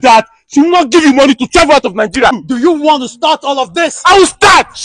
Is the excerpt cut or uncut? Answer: cut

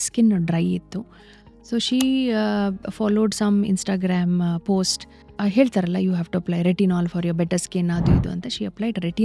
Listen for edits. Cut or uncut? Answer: cut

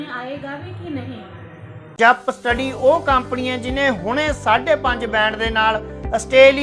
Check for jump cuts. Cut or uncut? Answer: cut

